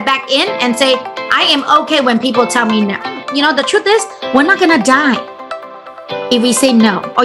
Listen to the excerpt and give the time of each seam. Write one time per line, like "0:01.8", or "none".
0:03.2